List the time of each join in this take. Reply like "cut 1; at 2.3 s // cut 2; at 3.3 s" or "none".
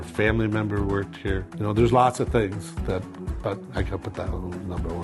cut 1; at 1.5 s